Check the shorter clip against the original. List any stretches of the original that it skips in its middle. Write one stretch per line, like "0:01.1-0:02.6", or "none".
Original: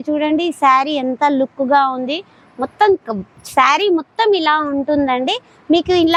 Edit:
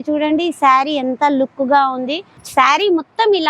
0:02.3-0:03.3